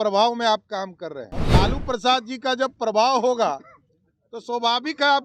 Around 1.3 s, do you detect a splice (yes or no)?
yes